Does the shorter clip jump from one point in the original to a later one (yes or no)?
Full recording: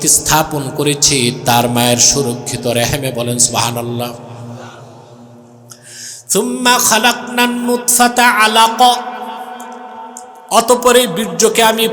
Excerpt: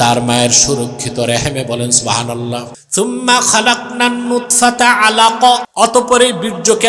yes